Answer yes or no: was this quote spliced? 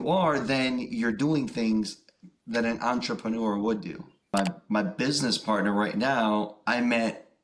yes